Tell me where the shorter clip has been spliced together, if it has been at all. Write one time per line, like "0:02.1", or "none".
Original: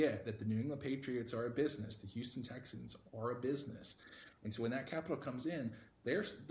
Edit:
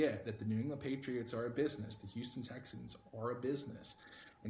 none